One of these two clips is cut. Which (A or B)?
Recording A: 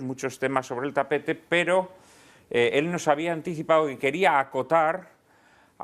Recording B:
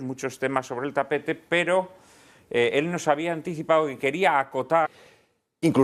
A